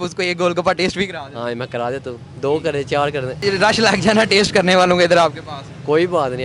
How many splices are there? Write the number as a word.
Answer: one